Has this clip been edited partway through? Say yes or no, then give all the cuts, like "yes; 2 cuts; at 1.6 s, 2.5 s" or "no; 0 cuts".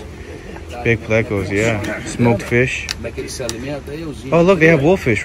no; 0 cuts